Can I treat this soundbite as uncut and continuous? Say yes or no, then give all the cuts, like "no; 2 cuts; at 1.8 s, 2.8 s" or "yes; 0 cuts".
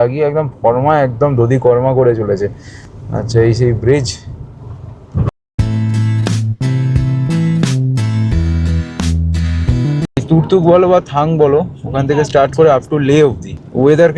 yes; 0 cuts